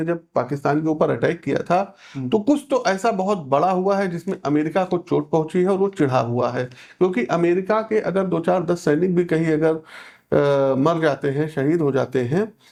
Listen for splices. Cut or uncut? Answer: uncut